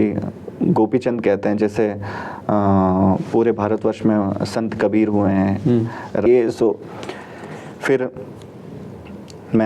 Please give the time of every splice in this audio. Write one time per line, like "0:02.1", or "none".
0:06.2